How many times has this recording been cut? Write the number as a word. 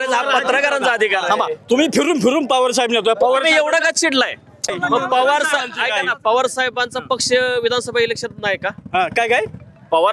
one